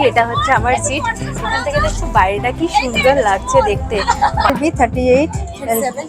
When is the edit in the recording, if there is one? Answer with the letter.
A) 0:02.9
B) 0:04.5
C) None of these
B